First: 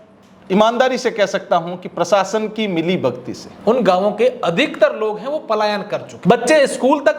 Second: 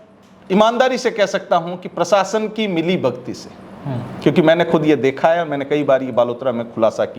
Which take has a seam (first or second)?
first